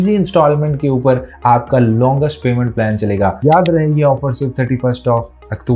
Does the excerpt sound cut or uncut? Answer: cut